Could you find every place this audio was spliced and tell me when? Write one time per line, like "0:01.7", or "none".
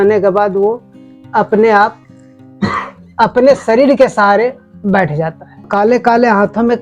0:05.7